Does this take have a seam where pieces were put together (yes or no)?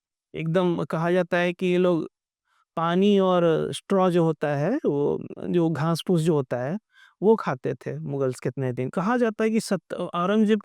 yes